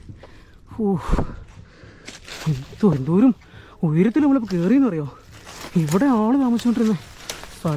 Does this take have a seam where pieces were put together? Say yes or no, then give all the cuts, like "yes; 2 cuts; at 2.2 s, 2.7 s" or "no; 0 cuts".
no; 0 cuts